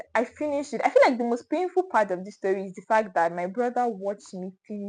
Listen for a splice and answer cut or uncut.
uncut